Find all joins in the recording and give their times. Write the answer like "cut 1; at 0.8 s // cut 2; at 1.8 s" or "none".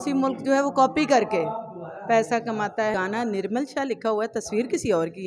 cut 1; at 2.9 s

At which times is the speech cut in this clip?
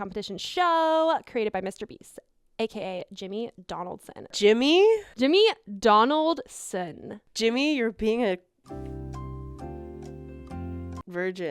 cut 1; at 4.3 s // cut 2; at 8.6 s

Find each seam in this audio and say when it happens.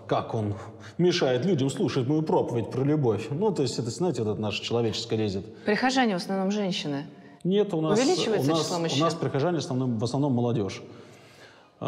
none

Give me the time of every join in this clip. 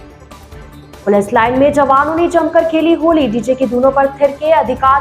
cut 1; at 1.0 s

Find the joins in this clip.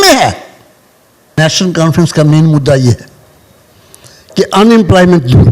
cut 1; at 1.4 s

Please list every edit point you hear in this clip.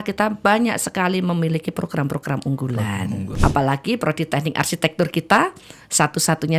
cut 1; at 3.3 s

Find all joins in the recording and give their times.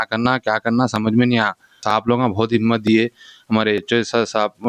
cut 1; at 1.8 s

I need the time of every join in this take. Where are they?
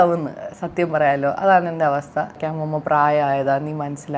cut 1; at 2.4 s

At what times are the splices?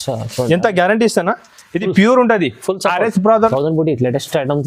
cut 1; at 3.5 s

